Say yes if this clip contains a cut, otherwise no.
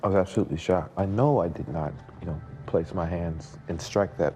yes